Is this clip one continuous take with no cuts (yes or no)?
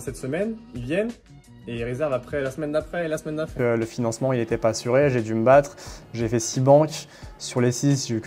no